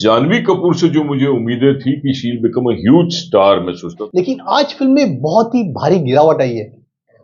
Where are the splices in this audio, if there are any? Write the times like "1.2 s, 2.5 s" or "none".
4.0 s